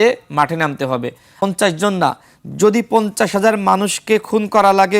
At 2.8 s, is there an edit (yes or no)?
no